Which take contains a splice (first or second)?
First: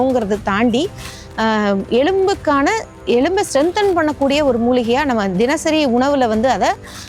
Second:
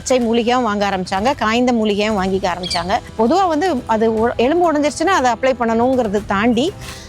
second